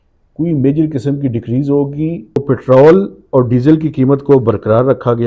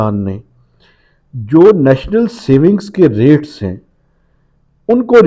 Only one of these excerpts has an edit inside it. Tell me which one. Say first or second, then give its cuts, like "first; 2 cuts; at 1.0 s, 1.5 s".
first; 1 cut; at 2.4 s